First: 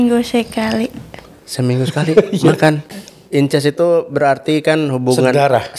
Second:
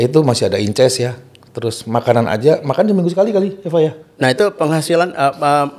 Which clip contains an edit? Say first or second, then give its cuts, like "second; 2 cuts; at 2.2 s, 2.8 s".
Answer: first; 1 cut; at 2.9 s